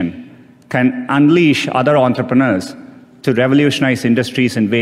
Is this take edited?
no; 0 cuts

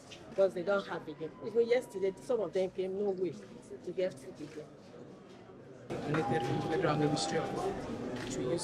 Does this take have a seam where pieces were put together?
yes; 1 cut; at 5.9 s

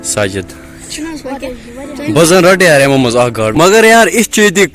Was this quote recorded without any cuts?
no; 1 cut; at 3.5 s

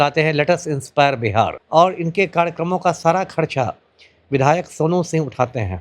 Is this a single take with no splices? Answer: no; 1 cut; at 1.6 s

